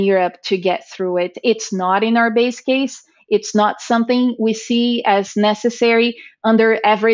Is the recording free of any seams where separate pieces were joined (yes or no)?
yes